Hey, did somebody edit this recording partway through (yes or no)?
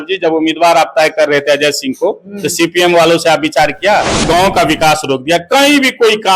yes